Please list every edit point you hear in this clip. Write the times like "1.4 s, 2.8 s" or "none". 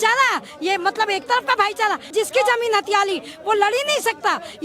2.1 s